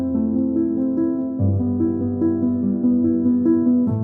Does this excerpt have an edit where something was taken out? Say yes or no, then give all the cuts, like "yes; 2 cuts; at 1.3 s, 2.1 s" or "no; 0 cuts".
no; 0 cuts